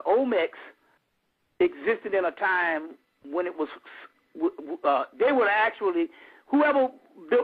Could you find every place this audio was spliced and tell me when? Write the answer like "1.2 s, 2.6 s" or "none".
1.8 s